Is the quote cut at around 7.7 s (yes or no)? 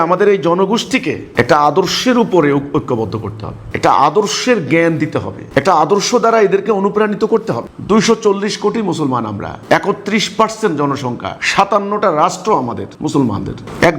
yes